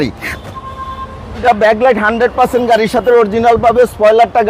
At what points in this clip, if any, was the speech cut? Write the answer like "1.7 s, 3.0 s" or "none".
1.4 s